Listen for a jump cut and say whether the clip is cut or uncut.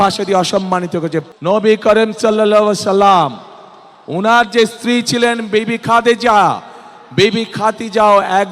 cut